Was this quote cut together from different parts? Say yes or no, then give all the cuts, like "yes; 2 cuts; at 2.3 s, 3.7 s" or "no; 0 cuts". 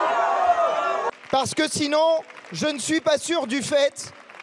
yes; 1 cut; at 1.2 s